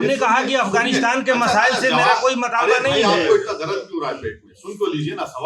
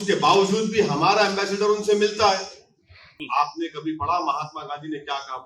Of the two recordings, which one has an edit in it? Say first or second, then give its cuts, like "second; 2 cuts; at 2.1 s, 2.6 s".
second; 1 cut; at 3.2 s